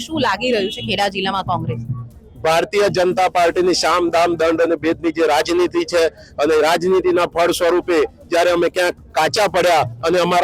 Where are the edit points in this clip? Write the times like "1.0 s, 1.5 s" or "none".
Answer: none